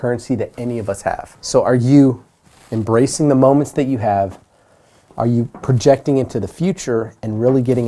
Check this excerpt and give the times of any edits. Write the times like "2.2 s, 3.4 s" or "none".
1.3 s